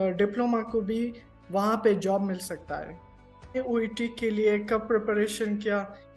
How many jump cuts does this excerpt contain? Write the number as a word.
one